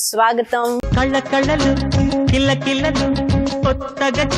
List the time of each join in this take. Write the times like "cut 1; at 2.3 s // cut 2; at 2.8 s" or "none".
none